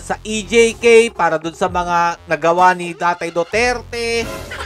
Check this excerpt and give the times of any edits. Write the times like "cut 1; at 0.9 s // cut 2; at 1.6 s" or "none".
none